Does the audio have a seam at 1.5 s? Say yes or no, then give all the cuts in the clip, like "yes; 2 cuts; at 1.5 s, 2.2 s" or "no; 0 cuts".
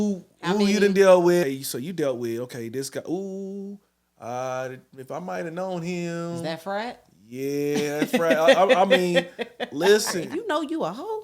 yes; 2 cuts; at 1.5 s, 10.2 s